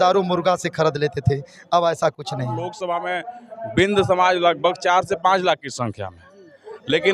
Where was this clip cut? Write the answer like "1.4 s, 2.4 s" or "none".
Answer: 2.8 s